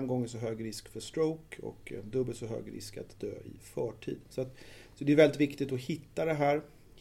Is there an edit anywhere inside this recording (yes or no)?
no